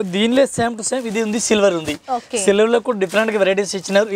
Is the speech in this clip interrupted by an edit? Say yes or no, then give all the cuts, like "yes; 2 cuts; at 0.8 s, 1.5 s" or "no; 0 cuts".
no; 0 cuts